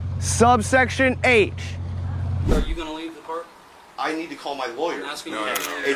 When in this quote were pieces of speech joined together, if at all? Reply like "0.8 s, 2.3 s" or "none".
2.5 s